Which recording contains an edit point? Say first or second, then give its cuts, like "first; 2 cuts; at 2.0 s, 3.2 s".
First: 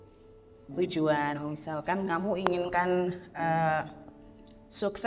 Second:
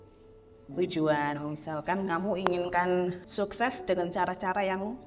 second; 1 cut; at 3.2 s